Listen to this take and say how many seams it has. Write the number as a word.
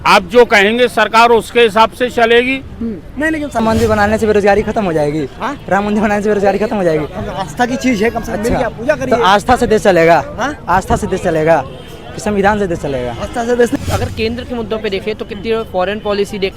two